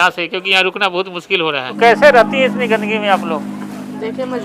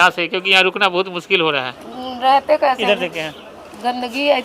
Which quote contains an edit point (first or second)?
second